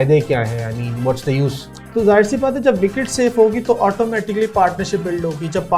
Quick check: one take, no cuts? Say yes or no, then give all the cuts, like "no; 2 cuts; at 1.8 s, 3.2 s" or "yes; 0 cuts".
no; 1 cut; at 1.8 s